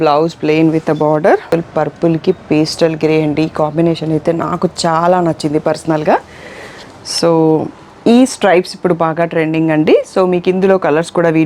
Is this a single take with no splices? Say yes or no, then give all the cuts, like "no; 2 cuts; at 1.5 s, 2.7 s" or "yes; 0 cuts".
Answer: no; 1 cut; at 1.5 s